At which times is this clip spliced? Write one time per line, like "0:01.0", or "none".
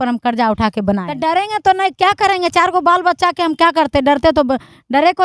0:01.1